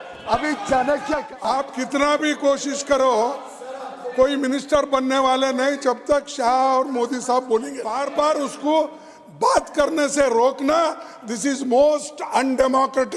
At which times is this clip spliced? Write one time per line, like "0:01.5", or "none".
0:01.3
0:08.0